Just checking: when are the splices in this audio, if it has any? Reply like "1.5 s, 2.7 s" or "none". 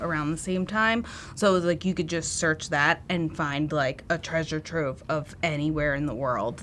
none

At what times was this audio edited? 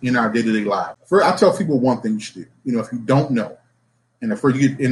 0.9 s

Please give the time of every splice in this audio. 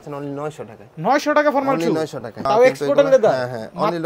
2.4 s

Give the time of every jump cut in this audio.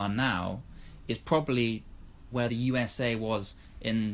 2.5 s

